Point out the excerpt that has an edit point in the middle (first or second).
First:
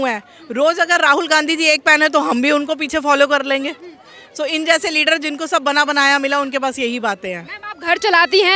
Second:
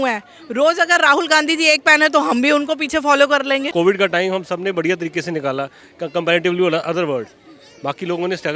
second